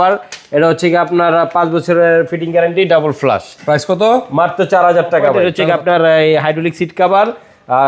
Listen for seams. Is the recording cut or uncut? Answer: cut